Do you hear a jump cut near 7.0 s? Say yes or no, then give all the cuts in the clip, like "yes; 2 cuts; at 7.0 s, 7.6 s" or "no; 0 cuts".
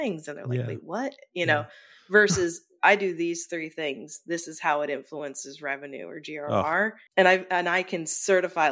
yes; 1 cut; at 7.0 s